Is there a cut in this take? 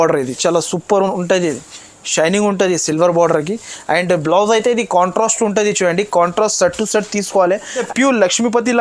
yes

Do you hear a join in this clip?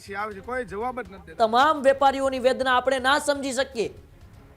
yes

